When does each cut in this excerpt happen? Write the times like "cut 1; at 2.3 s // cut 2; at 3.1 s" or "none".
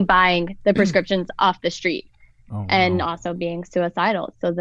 none